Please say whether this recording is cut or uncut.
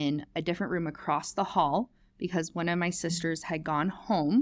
uncut